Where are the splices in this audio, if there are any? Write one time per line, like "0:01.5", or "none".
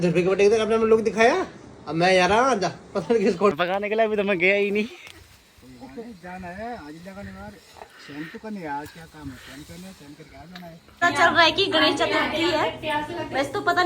0:03.5
0:10.9